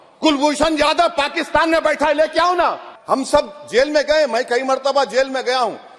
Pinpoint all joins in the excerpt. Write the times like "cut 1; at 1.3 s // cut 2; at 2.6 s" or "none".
cut 1; at 2.9 s